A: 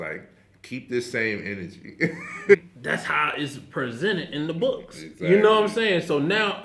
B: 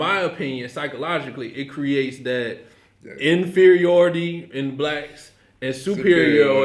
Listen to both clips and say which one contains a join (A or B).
A